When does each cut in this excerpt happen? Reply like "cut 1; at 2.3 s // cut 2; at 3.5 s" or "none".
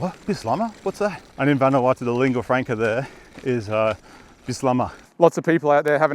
cut 1; at 1.2 s // cut 2; at 5.0 s